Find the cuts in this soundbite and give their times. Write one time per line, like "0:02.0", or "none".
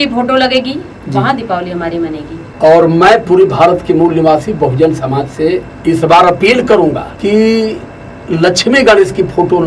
0:02.4
0:05.7
0:07.1